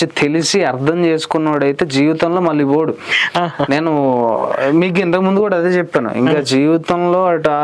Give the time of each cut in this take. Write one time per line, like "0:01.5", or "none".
none